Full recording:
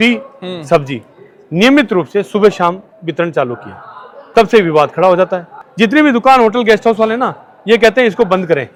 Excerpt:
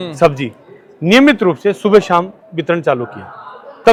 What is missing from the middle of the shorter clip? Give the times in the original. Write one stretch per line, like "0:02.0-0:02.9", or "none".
none